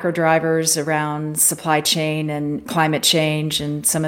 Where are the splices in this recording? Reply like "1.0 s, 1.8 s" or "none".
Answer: 2.6 s